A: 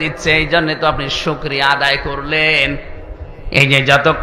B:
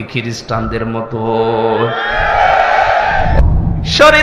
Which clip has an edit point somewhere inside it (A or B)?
B